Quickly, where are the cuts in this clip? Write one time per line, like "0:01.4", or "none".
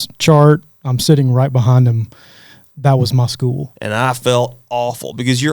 0:03.7